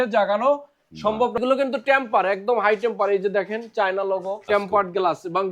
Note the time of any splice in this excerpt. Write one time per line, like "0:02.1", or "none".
0:01.4
0:04.5

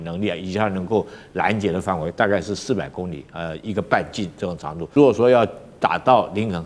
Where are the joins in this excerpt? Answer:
0:04.9

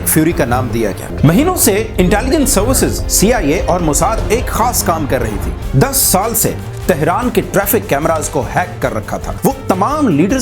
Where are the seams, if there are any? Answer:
0:01.0
0:05.6
0:09.3

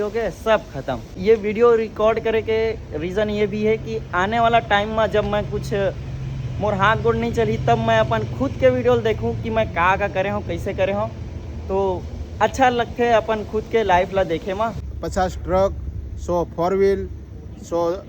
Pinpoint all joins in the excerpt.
0:01.2
0:14.8

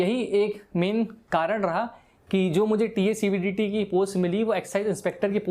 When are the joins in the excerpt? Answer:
none

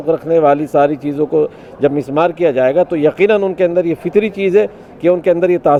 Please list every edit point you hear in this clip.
none

